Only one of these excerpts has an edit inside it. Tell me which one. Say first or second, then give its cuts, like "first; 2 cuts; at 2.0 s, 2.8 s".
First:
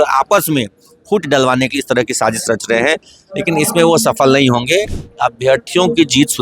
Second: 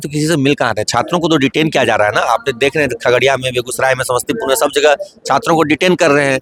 first; 1 cut; at 5.0 s